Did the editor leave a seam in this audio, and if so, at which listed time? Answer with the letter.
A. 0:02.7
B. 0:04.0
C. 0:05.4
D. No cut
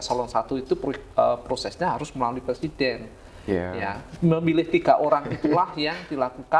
D